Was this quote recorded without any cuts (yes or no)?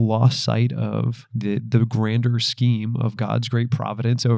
no